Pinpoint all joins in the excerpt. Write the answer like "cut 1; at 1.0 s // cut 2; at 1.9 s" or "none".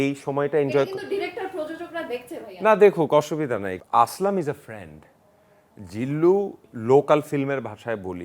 cut 1; at 3.7 s // cut 2; at 6.7 s